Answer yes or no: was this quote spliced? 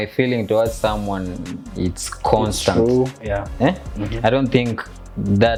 no